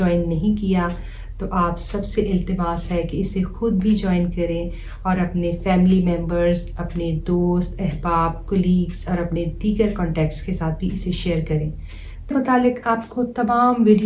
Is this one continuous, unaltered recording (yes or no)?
no